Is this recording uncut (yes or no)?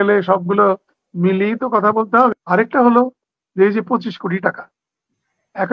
no